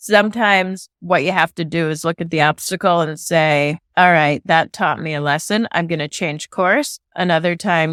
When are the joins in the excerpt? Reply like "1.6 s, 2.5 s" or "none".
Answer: none